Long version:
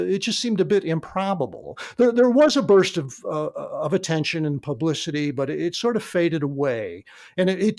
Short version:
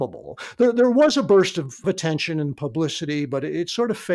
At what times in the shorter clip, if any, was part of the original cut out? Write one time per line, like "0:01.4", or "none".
0:01.8